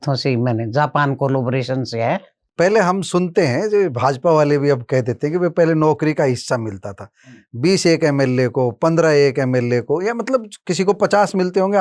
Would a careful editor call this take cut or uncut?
cut